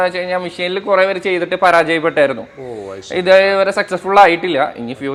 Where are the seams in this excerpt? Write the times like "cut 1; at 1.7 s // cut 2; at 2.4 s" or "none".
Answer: none